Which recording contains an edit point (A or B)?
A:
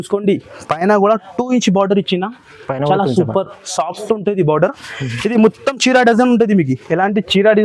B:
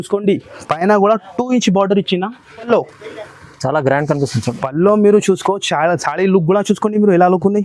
B